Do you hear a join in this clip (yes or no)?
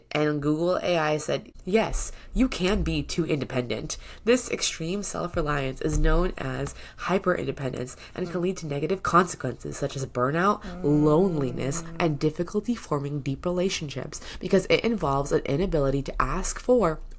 yes